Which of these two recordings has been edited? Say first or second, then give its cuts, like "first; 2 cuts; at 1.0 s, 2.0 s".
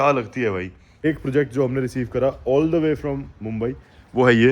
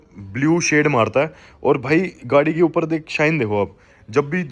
first; 1 cut; at 1.1 s